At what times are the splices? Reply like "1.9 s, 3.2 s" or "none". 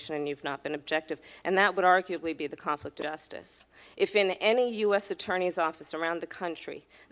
2.9 s